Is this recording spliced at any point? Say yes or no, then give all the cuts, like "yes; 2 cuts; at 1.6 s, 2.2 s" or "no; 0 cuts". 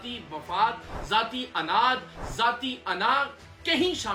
no; 0 cuts